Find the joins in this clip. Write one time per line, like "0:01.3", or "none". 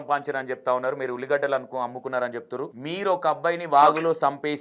0:02.8